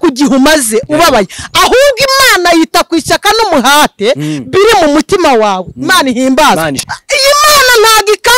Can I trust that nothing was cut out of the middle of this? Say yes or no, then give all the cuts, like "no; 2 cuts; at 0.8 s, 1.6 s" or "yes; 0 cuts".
no; 1 cut; at 6.8 s